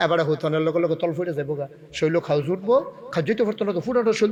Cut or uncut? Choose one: uncut